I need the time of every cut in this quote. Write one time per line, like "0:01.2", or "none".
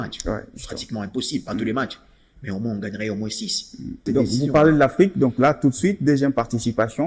0:04.0

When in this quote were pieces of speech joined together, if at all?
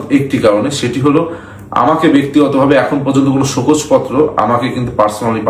none

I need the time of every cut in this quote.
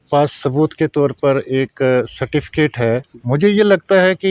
0:03.1

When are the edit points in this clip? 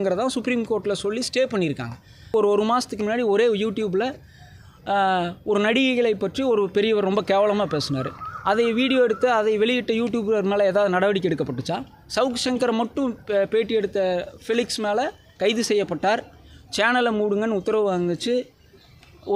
0:02.3

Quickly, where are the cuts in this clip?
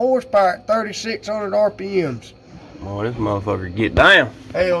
none

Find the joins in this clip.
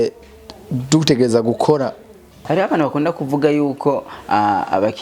0:02.4

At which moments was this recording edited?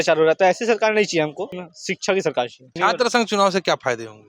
0:01.7
0:02.7

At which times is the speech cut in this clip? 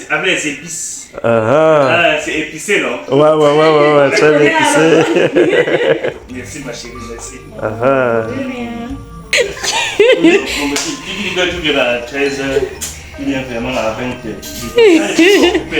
0:09.3

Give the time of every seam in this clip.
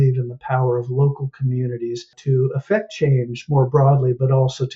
0:02.1

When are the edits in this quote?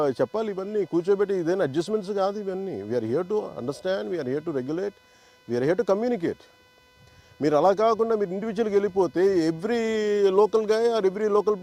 none

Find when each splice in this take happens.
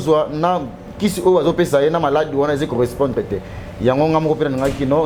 none

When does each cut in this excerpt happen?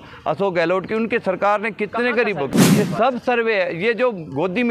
0:02.5

